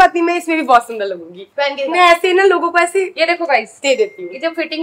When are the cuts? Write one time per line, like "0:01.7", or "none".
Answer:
none